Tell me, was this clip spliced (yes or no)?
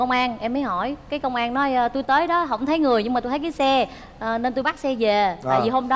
no